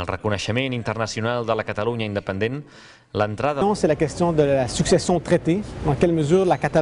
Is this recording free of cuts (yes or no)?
yes